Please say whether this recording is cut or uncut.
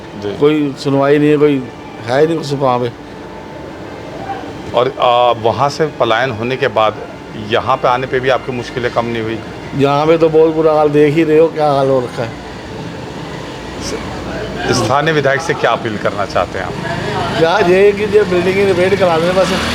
uncut